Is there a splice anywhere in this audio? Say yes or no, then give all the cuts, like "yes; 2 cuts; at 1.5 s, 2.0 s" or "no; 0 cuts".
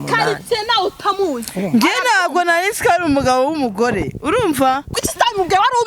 yes; 1 cut; at 5.0 s